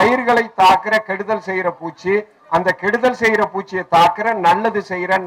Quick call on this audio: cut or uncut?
uncut